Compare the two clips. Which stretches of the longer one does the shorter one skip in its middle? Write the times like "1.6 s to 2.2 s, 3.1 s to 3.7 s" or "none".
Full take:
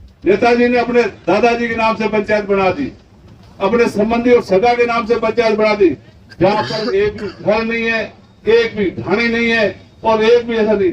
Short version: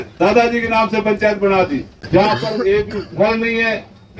3.0 s to 6.2 s